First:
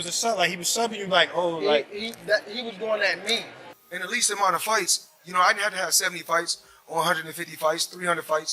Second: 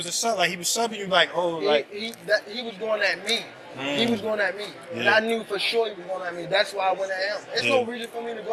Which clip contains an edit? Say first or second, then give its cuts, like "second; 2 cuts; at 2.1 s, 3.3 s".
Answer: first; 1 cut; at 3.6 s